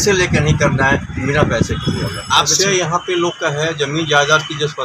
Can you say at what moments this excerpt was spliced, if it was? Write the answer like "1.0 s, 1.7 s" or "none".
2.5 s